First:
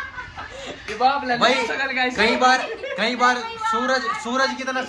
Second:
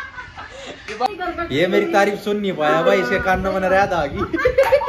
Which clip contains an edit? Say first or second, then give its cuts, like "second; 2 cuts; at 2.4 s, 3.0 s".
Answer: second; 1 cut; at 1.1 s